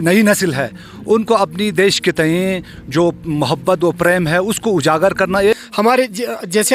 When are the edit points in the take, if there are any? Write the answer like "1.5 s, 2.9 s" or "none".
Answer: 5.5 s

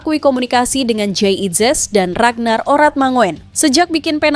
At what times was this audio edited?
3.4 s

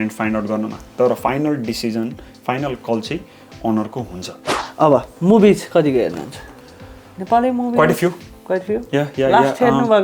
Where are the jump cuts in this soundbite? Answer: 4.5 s

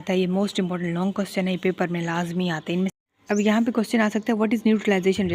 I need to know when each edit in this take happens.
3.0 s

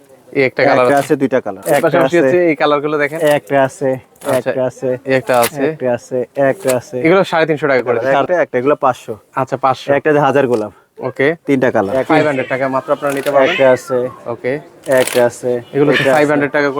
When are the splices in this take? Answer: 1.5 s, 8.1 s, 12.1 s

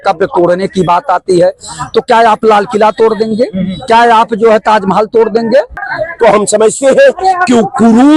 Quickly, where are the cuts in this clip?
5.9 s

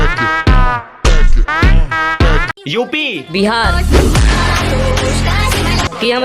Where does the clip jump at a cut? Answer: 2.5 s

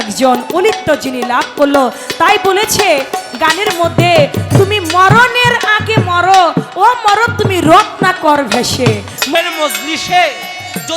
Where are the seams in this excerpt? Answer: 9.3 s

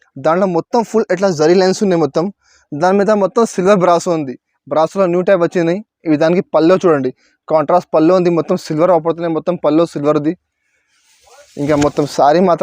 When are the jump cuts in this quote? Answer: none

